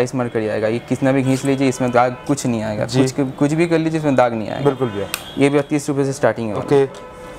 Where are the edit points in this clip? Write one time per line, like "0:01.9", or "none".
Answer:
none